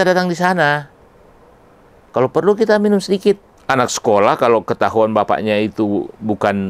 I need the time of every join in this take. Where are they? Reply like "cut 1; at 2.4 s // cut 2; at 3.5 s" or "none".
cut 1; at 3.5 s